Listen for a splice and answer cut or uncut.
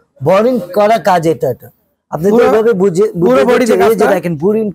uncut